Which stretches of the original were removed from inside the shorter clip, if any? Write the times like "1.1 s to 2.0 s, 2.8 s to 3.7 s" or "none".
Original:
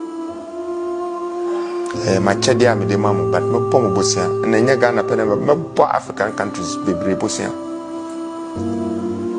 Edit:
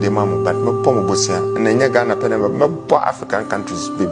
none